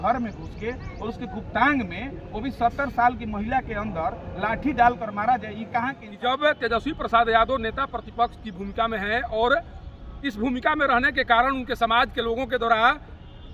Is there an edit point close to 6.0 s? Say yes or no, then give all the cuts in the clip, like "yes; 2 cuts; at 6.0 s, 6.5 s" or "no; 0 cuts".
yes; 1 cut; at 6.0 s